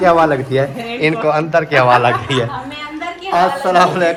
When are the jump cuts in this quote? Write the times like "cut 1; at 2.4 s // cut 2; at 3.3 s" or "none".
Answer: none